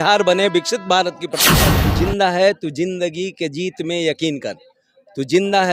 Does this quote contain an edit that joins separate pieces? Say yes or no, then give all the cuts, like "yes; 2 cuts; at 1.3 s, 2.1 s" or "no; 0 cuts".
yes; 1 cut; at 1.7 s